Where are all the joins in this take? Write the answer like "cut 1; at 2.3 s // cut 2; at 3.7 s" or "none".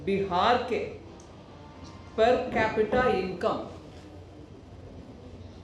none